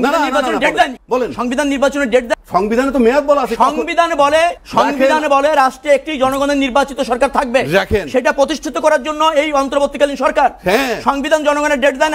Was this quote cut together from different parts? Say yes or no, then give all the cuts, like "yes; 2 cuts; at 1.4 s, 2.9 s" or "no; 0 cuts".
yes; 3 cuts; at 1.0 s, 2.3 s, 4.6 s